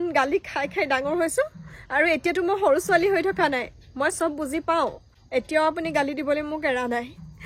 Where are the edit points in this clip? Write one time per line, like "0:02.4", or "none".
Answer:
none